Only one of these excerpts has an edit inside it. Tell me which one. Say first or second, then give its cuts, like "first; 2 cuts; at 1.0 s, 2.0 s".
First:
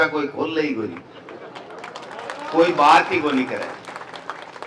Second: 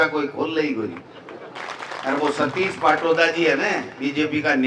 second; 1 cut; at 1.6 s